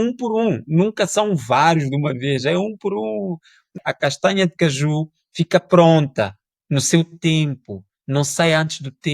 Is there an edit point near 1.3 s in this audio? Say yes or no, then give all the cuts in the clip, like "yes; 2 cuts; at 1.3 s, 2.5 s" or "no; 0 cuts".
no; 1 cut; at 3.7 s